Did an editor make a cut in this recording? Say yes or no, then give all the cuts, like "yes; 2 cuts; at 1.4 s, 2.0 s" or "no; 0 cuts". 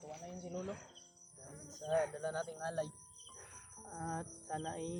no; 0 cuts